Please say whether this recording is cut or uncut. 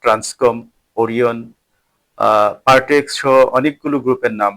uncut